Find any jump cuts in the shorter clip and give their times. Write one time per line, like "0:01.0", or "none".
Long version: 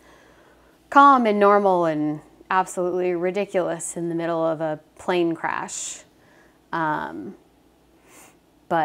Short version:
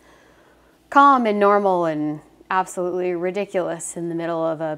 none